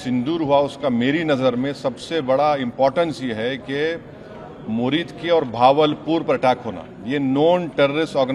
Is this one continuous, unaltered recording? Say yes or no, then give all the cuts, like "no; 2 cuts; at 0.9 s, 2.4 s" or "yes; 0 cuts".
yes; 0 cuts